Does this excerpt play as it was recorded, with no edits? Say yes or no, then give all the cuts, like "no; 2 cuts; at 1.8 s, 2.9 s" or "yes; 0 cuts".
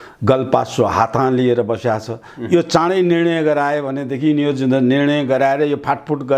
yes; 0 cuts